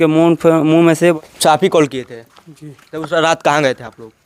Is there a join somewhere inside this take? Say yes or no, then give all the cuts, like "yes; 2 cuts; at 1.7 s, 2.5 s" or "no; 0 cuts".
yes; 1 cut; at 1.1 s